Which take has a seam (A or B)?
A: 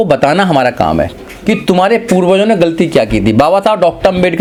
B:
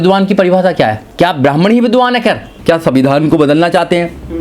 B